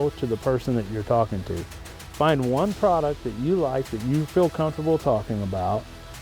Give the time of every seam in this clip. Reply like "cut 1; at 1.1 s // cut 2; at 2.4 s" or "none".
none